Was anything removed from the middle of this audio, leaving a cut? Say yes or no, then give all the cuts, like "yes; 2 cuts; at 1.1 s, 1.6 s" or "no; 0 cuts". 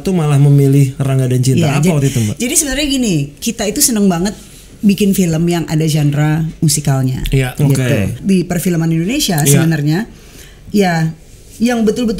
yes; 2 cuts; at 3.3 s, 8.2 s